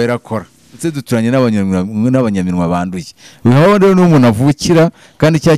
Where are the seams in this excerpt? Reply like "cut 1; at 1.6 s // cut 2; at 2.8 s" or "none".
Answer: cut 1; at 0.9 s

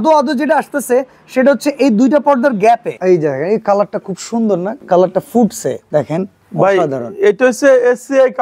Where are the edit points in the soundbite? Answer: cut 1; at 2.9 s // cut 2; at 4.7 s // cut 3; at 5.8 s

